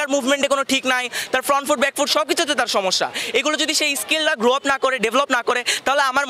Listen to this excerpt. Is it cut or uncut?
uncut